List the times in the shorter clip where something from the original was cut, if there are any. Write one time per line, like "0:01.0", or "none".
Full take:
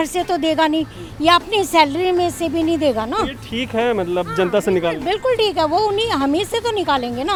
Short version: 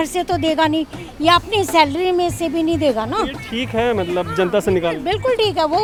none